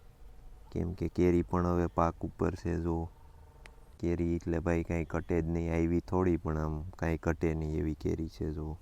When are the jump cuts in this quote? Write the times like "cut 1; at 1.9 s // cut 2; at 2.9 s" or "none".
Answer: none